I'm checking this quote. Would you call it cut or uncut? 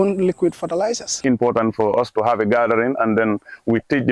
cut